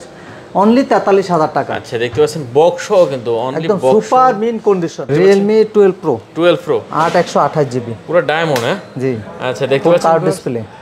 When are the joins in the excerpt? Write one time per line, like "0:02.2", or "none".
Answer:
0:05.1